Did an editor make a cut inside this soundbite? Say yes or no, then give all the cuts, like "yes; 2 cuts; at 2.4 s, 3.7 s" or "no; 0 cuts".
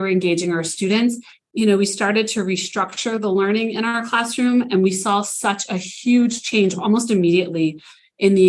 yes; 1 cut; at 1.3 s